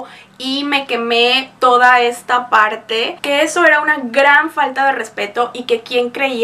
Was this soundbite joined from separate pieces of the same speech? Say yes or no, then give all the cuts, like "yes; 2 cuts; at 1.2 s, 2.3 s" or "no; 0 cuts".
yes; 1 cut; at 3.1 s